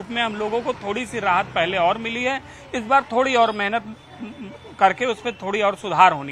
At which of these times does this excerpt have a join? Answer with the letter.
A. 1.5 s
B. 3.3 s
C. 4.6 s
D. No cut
D